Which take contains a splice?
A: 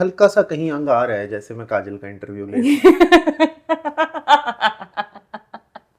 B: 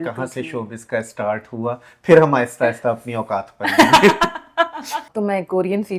B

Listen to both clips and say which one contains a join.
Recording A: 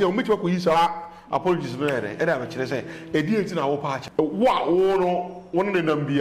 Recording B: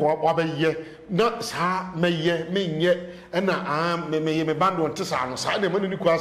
A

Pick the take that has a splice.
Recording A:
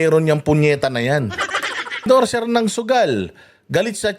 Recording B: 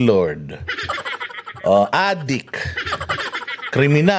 A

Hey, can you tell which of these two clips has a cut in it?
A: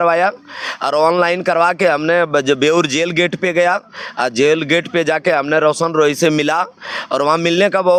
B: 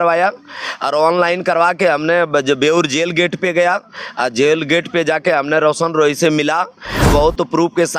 B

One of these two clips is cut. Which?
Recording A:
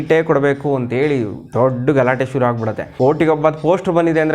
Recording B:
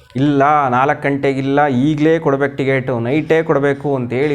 A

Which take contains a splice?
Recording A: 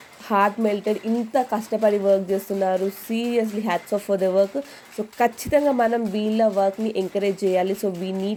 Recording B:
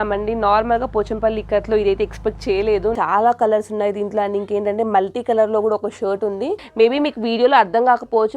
B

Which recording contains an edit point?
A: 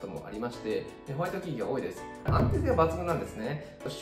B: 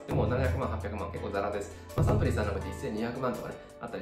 A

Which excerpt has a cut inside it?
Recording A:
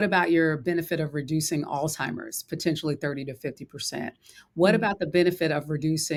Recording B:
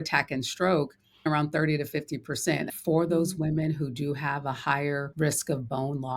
B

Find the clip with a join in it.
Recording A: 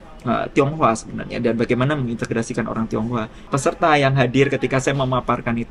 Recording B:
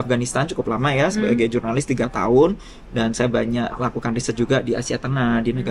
A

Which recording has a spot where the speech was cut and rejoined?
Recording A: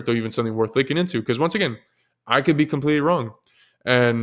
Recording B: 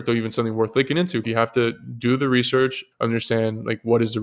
B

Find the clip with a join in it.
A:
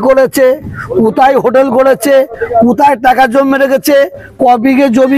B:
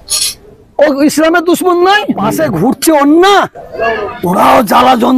B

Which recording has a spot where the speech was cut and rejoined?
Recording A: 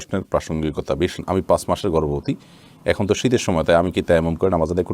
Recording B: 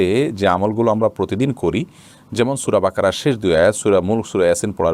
A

